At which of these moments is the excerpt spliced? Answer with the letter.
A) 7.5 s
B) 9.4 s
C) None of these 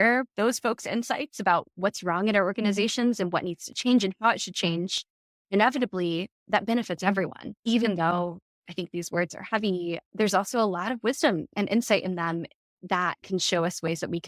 A